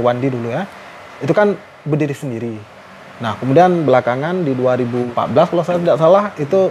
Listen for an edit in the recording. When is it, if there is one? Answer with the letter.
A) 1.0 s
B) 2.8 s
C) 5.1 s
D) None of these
C